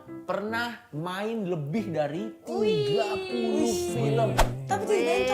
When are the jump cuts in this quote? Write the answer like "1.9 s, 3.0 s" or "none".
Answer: none

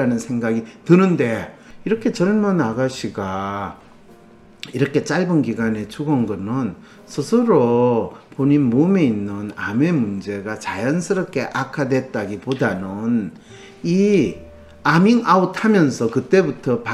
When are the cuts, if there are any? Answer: 1.7 s

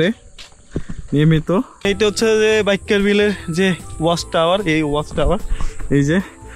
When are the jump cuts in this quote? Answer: 1.9 s

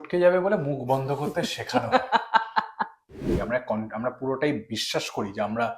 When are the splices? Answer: 3.4 s

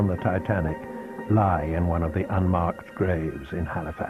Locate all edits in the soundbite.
2.6 s

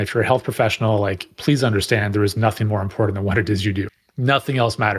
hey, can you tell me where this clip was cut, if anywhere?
3.9 s

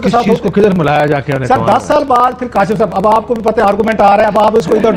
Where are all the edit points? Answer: none

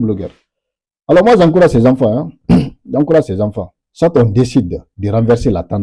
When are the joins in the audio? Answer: none

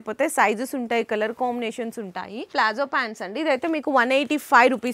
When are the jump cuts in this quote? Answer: 2.5 s

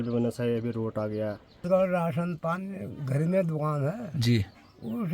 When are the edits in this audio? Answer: 1.6 s

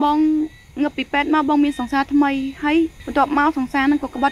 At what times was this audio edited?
3.0 s

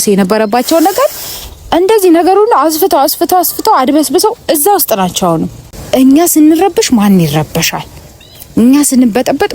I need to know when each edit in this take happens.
5.6 s

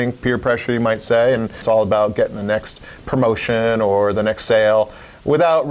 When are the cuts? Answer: 1.6 s

